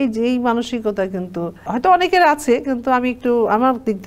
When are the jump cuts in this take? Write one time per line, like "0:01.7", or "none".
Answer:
0:01.7